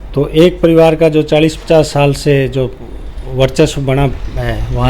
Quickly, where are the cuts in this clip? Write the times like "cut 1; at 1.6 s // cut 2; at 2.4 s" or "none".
none

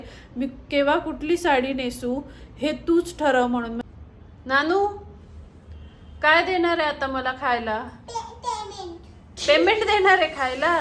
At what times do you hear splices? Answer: cut 1; at 3.8 s

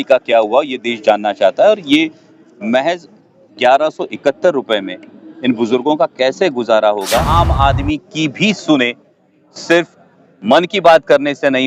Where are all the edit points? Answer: cut 1; at 7.3 s

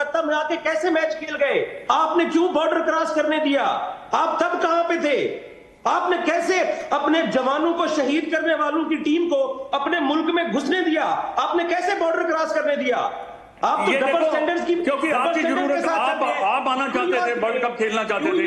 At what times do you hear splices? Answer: none

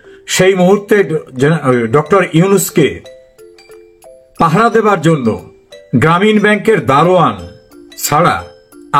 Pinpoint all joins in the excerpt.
none

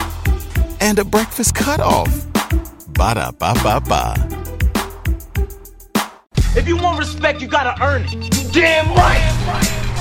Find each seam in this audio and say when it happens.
cut 1; at 6.2 s

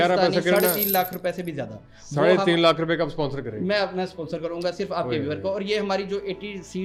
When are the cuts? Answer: none

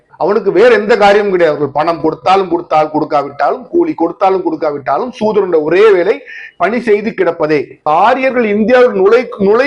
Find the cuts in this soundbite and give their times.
cut 1; at 7.9 s

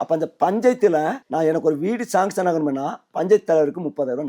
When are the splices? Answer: cut 1; at 1.2 s

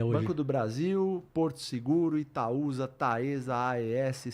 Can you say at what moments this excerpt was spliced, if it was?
none

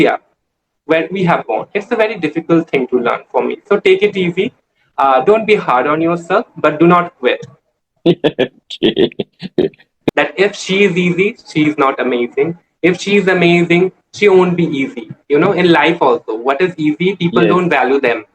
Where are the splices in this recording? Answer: cut 1; at 10.0 s

